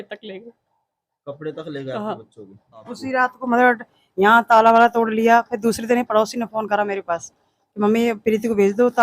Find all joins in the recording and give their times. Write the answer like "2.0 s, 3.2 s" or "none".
3.0 s